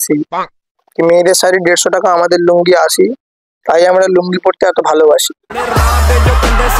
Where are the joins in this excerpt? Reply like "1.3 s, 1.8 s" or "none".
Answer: none